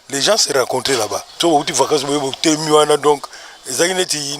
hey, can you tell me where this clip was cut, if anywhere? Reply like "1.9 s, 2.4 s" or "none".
1.3 s